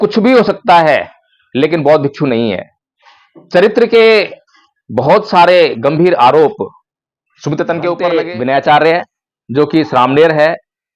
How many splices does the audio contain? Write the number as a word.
one